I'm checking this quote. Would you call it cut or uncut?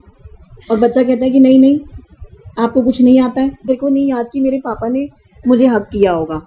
cut